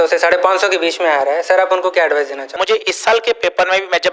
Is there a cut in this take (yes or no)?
yes